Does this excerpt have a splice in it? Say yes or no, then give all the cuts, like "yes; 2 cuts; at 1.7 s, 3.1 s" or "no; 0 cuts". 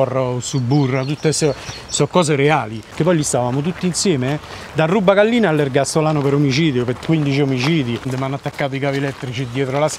yes; 2 cuts; at 2.9 s, 8.1 s